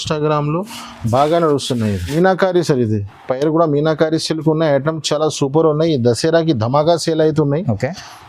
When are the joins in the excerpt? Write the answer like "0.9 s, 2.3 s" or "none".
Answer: 2.1 s